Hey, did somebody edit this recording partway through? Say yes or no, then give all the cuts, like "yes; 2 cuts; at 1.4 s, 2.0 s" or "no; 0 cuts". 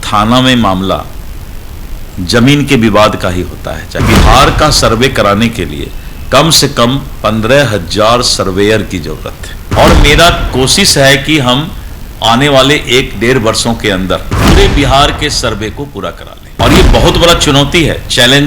yes; 2 cuts; at 4.0 s, 9.6 s